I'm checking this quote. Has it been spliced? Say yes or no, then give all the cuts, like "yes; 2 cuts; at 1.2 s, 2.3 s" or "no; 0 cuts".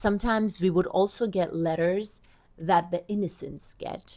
no; 0 cuts